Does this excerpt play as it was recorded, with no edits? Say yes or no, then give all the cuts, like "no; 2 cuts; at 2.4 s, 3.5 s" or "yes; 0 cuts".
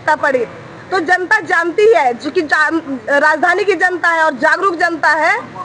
yes; 0 cuts